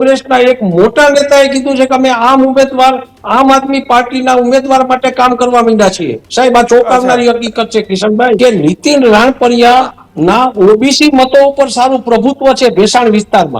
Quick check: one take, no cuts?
no; 1 cut; at 8.4 s

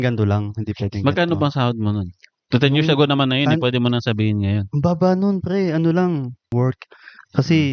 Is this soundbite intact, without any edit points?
no; 1 cut; at 6.5 s

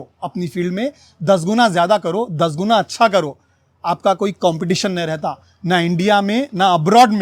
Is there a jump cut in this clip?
no; 0 cuts

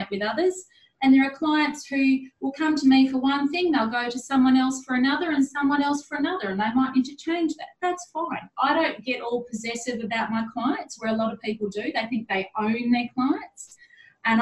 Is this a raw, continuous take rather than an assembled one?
yes; 0 cuts

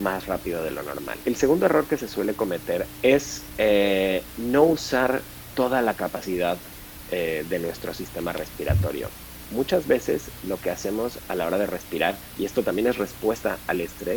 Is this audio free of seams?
no; 2 cuts; at 1.1 s, 2.9 s

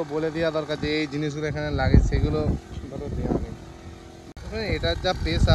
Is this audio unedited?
no; 1 cut; at 4.3 s

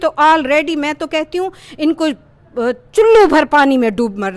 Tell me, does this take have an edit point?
no; 0 cuts

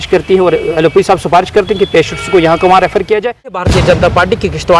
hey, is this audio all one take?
no; 1 cut; at 3.6 s

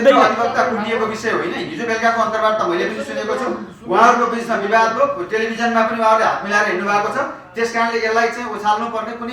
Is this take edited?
no; 0 cuts

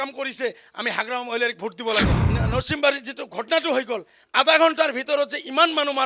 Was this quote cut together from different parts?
yes; 1 cut; at 2.2 s

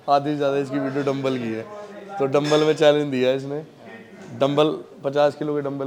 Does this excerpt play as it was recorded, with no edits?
yes; 0 cuts

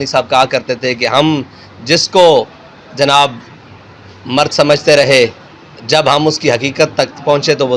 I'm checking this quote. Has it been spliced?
no; 0 cuts

